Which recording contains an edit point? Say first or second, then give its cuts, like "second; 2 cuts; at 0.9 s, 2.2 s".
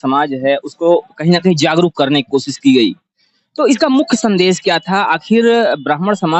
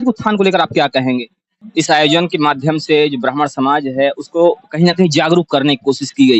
second; 1 cut; at 1.6 s